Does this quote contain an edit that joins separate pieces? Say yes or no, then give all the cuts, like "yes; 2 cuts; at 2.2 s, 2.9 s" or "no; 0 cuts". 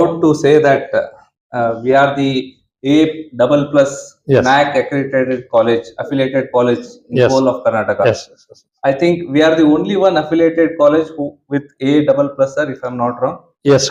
no; 0 cuts